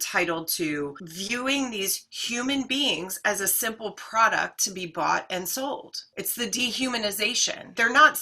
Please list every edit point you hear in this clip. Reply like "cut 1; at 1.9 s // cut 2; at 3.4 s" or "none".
cut 1; at 1.1 s